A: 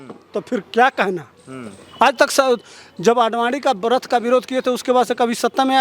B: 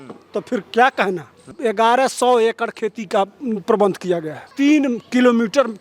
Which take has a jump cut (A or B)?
B